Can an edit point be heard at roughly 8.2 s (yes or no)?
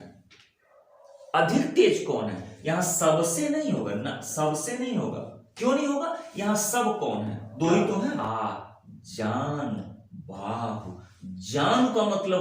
yes